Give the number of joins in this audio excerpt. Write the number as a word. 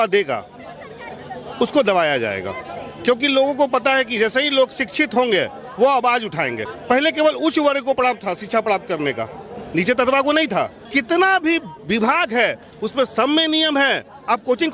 two